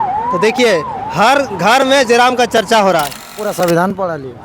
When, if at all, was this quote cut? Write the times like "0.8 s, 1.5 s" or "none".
3.4 s